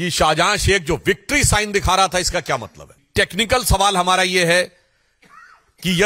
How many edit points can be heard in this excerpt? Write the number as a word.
one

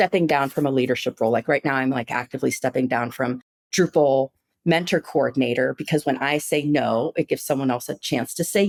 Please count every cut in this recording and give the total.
zero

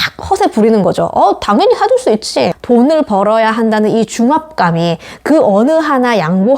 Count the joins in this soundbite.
one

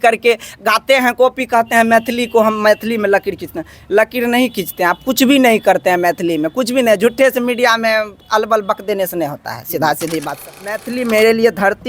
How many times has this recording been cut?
one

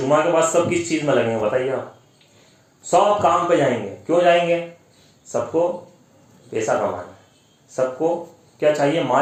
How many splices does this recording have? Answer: zero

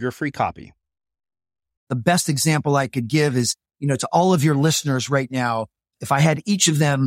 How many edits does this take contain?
two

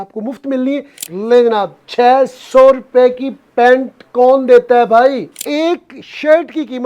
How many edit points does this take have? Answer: two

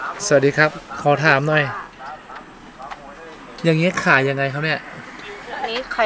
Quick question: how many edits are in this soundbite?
zero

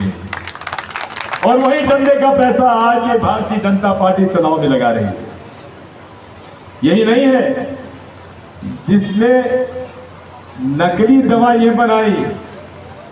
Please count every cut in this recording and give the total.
zero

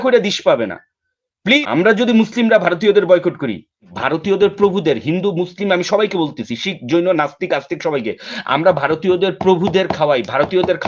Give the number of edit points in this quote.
two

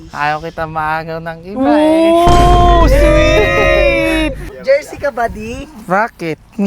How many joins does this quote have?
one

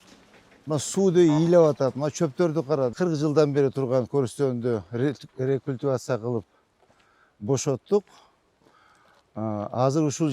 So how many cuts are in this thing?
one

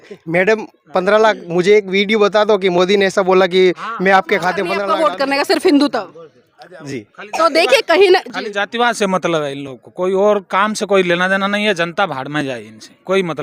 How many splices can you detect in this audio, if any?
one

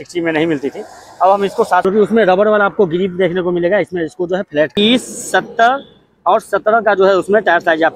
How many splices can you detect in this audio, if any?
two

